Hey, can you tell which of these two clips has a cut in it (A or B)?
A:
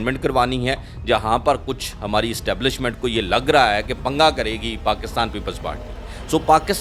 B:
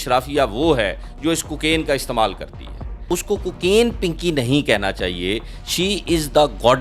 B